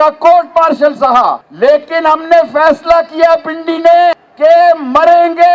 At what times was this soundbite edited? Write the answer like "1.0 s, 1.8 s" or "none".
1.5 s, 4.3 s

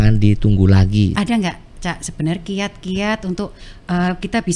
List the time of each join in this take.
1.1 s

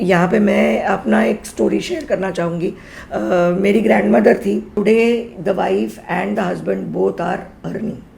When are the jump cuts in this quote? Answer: 4.7 s

